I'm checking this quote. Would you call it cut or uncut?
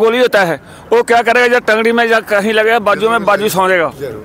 uncut